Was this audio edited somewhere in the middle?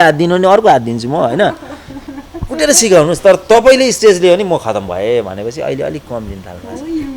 no; 0 cuts

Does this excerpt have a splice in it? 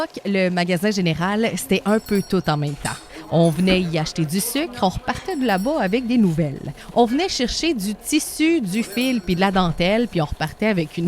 yes; 1 cut; at 6.8 s

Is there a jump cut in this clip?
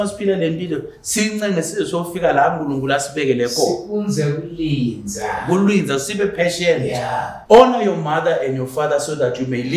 yes; 1 cut; at 7.3 s

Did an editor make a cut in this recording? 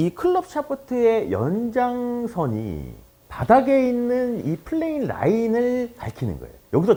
no; 0 cuts

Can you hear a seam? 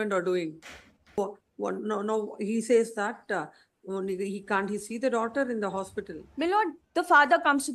yes; 1 cut; at 1.2 s

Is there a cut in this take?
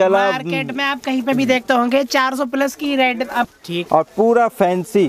yes; 1 cut; at 3.5 s

